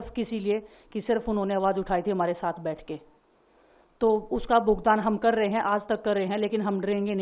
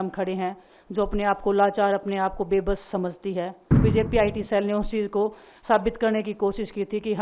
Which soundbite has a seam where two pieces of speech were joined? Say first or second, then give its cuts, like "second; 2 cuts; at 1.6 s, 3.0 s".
second; 1 cut; at 3.8 s